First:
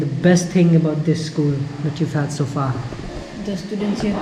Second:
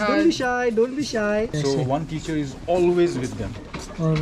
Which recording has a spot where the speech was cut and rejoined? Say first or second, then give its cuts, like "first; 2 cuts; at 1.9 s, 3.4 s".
second; 1 cut; at 1.6 s